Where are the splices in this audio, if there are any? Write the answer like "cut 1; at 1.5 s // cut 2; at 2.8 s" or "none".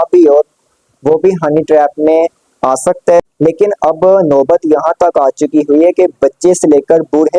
cut 1; at 3.3 s